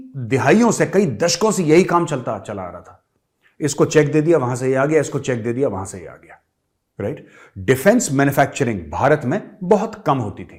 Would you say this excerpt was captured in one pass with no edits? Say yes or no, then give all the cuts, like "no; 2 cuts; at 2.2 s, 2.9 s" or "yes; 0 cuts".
yes; 0 cuts